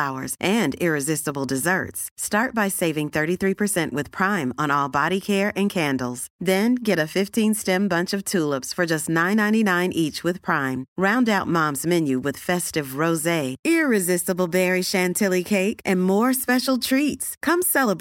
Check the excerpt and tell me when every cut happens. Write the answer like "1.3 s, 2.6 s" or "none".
none